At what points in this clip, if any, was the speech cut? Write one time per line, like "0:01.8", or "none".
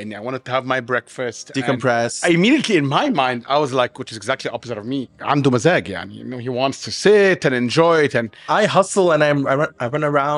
0:02.2
0:05.1
0:08.5